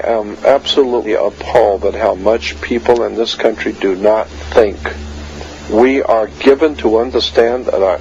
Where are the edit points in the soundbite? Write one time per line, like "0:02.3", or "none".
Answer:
0:03.3